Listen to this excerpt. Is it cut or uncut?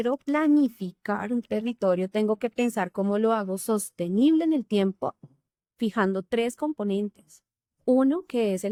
uncut